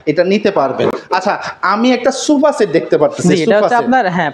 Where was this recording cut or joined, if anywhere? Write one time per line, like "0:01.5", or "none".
none